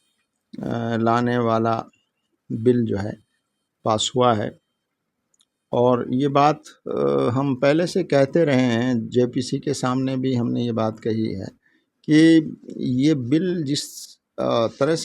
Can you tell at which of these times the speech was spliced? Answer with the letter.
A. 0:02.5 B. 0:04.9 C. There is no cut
C